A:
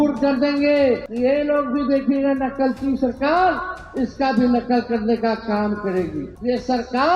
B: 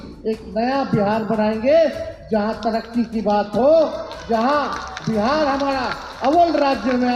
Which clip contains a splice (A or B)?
A